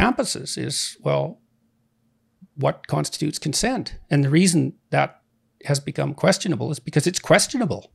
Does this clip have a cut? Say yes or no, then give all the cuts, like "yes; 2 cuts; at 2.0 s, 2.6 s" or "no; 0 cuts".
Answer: no; 0 cuts